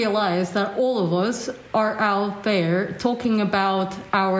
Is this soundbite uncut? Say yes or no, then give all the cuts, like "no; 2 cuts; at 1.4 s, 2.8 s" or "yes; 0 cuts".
yes; 0 cuts